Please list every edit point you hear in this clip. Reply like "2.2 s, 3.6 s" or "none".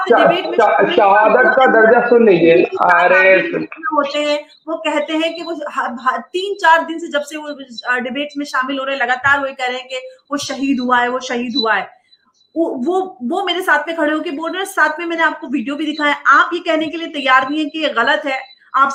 none